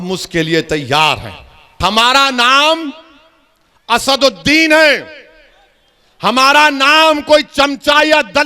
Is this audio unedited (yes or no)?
no